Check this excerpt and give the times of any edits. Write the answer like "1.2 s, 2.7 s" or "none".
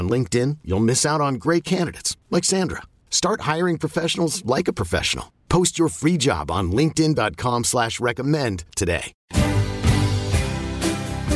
9.1 s